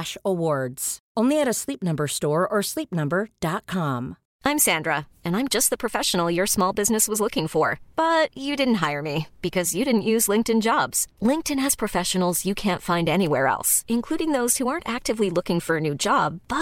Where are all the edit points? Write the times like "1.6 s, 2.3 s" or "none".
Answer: 4.2 s